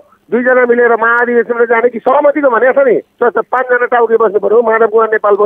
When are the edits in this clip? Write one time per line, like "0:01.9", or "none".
none